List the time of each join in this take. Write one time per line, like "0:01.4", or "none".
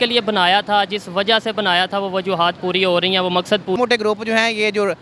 0:03.8